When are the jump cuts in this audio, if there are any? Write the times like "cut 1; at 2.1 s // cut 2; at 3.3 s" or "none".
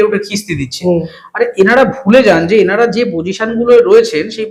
none